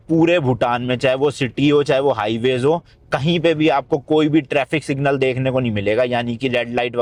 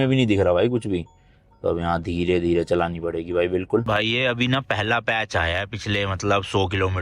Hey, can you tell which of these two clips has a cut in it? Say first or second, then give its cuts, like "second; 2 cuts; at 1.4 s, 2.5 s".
second; 1 cut; at 3.8 s